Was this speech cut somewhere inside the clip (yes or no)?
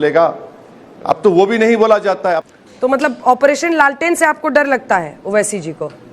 yes